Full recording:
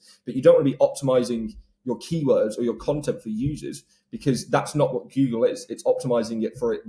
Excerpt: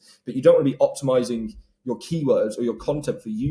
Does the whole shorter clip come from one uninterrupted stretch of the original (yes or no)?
yes